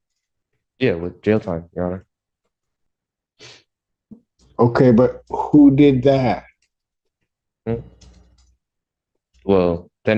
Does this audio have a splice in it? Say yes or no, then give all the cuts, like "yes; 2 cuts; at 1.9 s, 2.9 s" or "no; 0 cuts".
no; 0 cuts